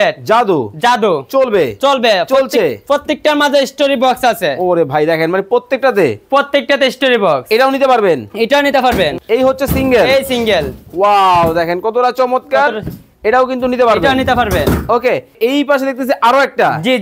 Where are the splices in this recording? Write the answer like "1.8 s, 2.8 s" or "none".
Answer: 9.2 s, 15.4 s